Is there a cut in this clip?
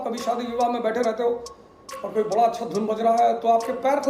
no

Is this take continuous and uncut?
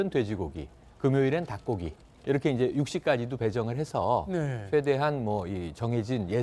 no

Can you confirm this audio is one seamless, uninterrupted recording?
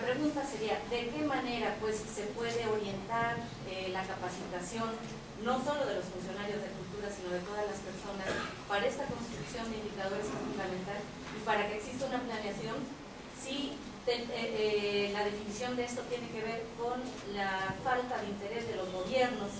no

